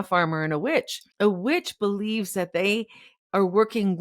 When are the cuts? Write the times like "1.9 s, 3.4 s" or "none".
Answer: 1.0 s